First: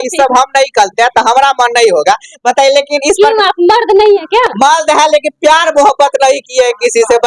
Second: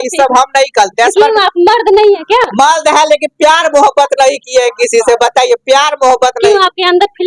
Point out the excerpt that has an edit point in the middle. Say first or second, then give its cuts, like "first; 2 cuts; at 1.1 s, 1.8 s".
second; 1 cut; at 1.1 s